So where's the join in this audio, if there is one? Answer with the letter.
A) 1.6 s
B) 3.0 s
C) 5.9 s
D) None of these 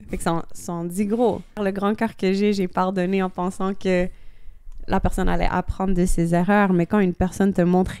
A